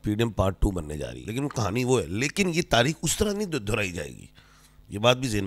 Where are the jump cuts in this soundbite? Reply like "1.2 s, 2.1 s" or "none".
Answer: 1.2 s